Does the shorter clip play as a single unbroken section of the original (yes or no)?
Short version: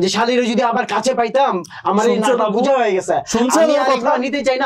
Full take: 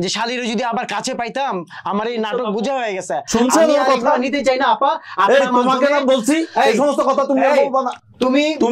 yes